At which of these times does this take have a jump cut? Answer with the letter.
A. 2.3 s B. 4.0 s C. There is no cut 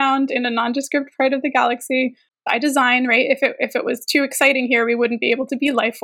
A